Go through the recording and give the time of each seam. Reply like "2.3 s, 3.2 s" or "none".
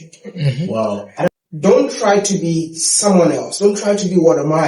1.3 s